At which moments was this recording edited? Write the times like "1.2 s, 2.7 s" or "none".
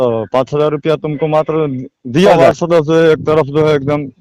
2.4 s